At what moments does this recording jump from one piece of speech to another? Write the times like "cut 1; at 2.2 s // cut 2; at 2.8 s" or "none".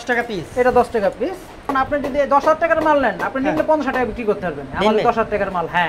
cut 1; at 1.7 s